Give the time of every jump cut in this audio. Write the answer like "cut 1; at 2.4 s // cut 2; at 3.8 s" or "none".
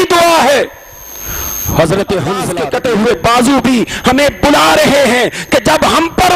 cut 1; at 2.5 s